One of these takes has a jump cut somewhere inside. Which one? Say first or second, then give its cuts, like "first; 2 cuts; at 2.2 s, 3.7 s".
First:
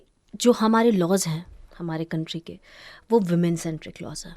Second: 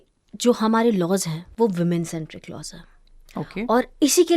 second; 1 cut; at 1.4 s